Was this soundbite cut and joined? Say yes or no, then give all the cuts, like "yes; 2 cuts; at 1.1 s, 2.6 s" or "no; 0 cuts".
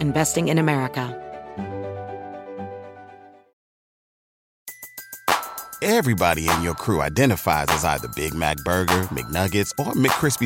yes; 1 cut; at 1.1 s